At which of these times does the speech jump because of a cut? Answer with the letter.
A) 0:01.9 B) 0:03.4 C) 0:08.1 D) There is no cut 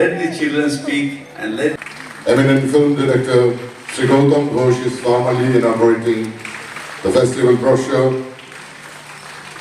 A